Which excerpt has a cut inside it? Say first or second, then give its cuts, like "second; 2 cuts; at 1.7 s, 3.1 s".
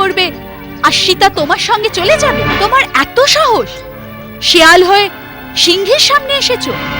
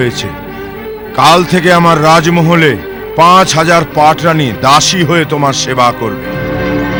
first; 1 cut; at 2.4 s